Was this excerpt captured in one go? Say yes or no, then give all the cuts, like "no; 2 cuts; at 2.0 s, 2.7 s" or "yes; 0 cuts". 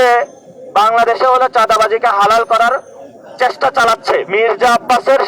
no; 1 cut; at 4.3 s